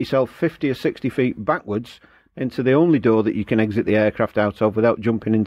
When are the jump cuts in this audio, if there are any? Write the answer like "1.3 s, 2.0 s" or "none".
none